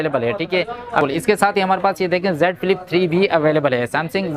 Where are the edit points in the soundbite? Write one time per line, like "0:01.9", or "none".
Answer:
0:01.0